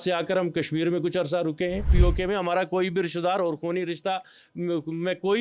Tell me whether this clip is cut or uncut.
cut